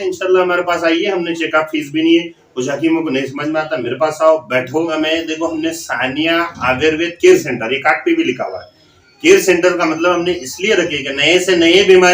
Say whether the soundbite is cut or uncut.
cut